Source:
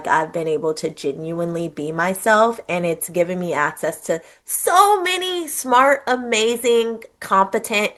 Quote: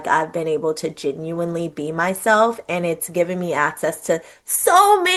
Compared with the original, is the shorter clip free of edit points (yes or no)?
yes